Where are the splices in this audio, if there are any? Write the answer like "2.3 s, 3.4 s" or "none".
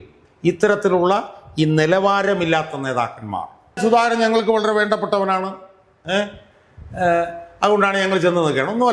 3.8 s